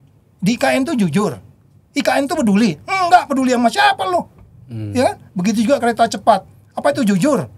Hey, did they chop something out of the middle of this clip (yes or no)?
no